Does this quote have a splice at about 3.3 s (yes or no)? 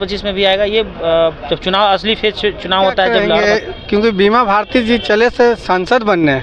yes